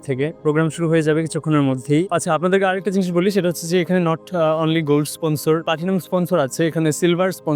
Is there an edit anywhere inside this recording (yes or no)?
no